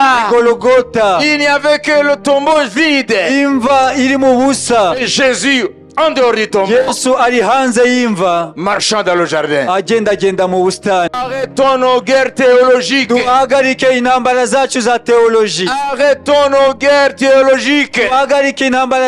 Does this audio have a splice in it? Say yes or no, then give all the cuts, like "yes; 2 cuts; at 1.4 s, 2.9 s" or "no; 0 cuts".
yes; 1 cut; at 11.1 s